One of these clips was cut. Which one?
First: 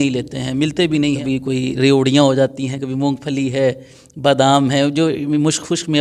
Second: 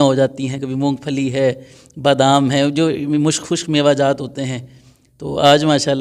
first; 1 cut; at 1.2 s

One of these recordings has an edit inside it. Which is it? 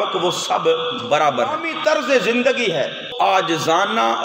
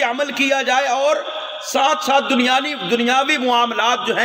first; 2 cuts; at 1.7 s, 3.0 s

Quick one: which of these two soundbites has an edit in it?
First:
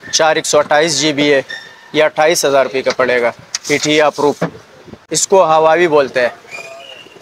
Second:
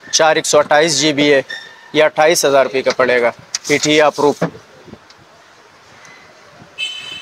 first; 1 cut; at 5.1 s

